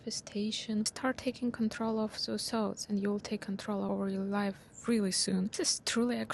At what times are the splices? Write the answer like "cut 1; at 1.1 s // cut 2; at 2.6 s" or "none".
cut 1; at 0.9 s // cut 2; at 3.9 s // cut 3; at 5.6 s

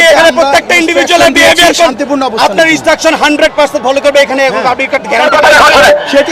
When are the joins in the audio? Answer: cut 1; at 5.3 s

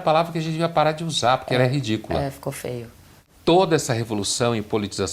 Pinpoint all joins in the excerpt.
cut 1; at 3.2 s

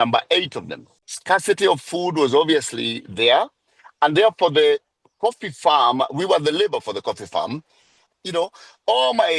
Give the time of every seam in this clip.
none

